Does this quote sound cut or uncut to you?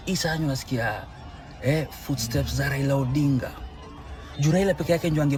uncut